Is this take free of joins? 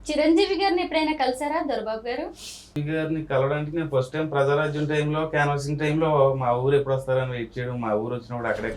no; 1 cut; at 2.8 s

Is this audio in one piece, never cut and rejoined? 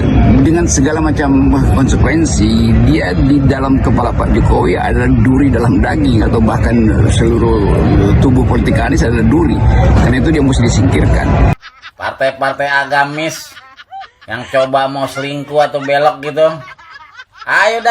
no; 1 cut; at 11.5 s

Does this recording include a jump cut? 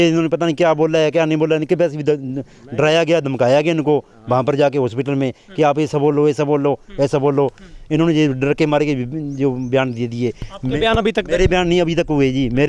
no; 0 cuts

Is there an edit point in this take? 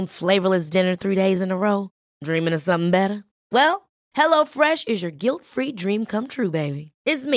no; 0 cuts

